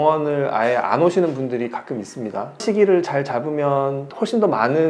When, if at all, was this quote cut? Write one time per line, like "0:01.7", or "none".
0:02.5

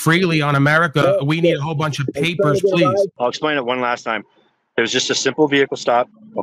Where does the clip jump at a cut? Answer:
0:03.1

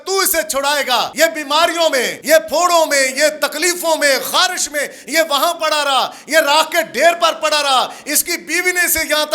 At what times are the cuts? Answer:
0:01.1
0:02.1

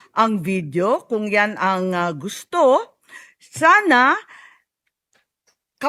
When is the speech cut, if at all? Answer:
none

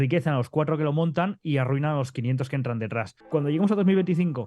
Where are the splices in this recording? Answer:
0:03.1

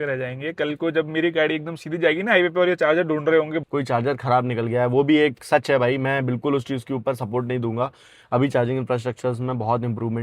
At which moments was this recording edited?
0:03.6

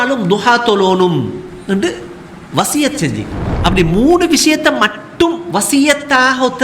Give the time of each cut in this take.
0:03.4

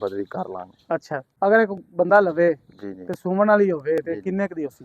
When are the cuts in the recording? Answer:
0:01.3

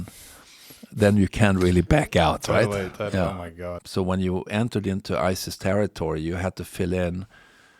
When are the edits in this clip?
0:03.7

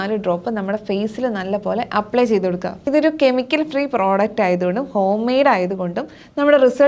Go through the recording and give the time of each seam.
0:02.8

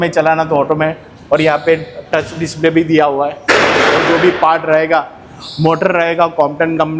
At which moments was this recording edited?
none

